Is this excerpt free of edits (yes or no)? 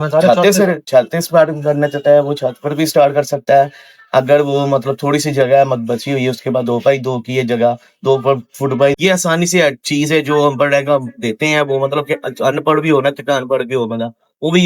no